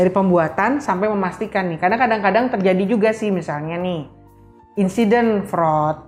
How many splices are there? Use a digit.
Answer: 0